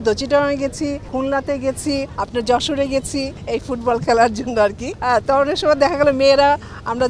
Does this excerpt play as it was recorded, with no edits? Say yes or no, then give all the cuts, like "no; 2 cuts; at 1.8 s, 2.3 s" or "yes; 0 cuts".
no; 4 cuts; at 1.0 s, 2.2 s, 3.4 s, 4.9 s